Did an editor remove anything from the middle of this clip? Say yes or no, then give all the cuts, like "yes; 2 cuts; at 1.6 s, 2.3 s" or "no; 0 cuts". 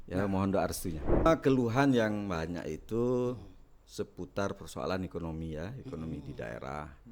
yes; 1 cut; at 1.3 s